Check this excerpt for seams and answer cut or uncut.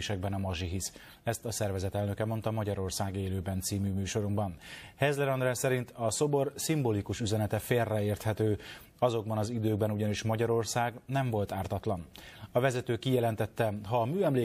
uncut